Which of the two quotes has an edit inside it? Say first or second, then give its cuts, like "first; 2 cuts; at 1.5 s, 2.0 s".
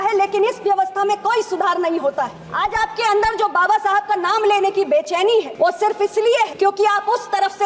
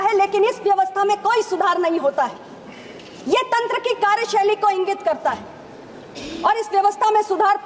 first; 3 cuts; at 2.4 s, 5.5 s, 6.5 s